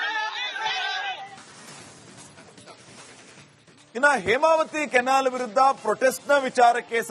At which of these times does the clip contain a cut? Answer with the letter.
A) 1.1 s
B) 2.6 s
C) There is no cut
A